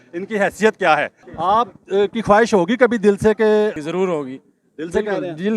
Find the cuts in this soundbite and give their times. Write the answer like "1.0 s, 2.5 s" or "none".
1.2 s, 3.8 s

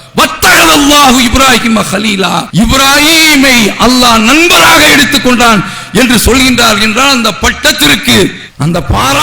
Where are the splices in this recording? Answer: 2.5 s

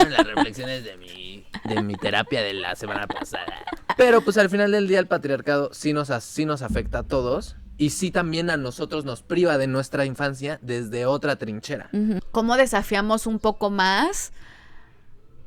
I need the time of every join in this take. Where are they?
3.9 s, 12.2 s

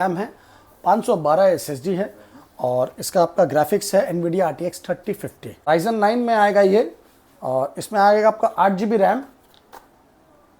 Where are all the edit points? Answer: 5.7 s

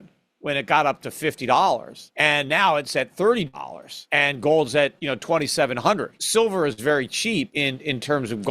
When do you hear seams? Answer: 2.0 s, 6.1 s, 7.5 s

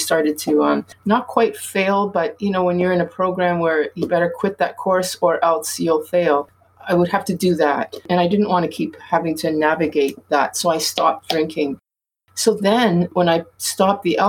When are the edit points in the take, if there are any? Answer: 8.0 s, 13.1 s

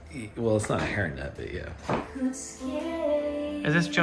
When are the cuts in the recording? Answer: 2.0 s

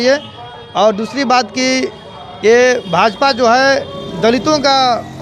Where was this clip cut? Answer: none

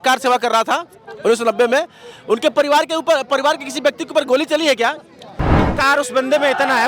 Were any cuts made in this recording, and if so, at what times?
5.6 s

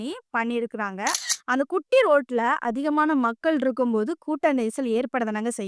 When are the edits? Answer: 1.2 s

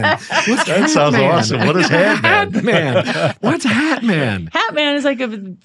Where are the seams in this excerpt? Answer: none

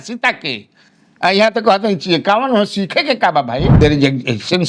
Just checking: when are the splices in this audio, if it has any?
3.7 s

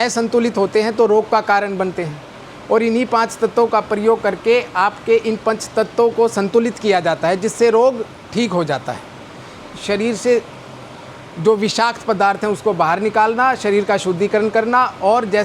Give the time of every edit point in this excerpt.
9.6 s

